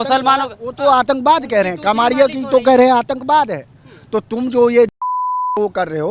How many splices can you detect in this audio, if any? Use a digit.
0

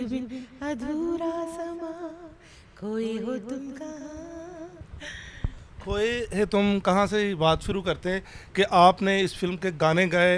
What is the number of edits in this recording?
0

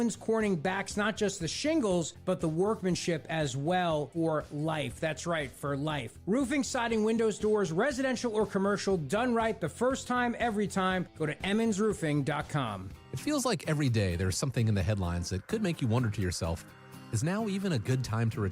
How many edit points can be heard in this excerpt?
1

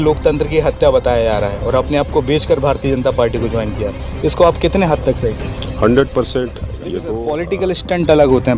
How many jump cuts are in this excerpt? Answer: 1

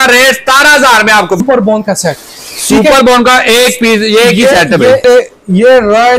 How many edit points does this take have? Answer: 2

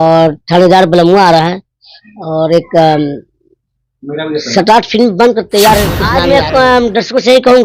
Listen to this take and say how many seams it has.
1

